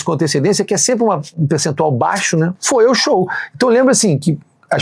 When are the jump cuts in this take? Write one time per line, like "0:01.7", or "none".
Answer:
0:02.6